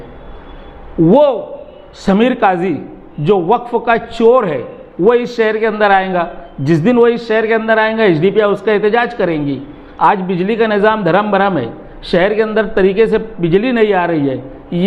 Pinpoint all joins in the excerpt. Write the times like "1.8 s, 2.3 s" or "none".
none